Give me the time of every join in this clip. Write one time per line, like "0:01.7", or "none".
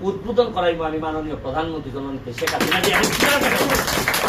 none